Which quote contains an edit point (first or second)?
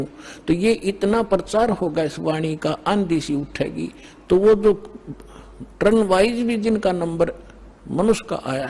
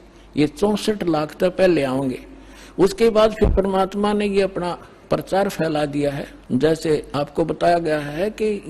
second